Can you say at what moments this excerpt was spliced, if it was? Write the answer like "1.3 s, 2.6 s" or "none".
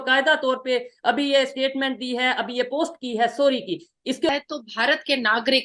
4.3 s

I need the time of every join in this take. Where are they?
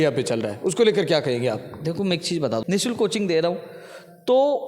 2.1 s

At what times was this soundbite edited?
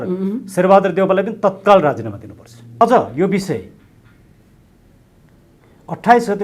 2.8 s

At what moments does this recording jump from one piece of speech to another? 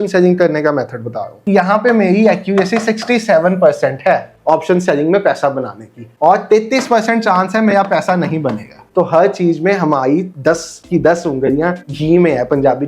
1.3 s, 8.8 s, 10.3 s, 11.9 s

